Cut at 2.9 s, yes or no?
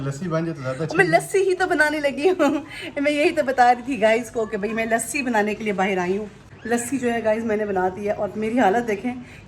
no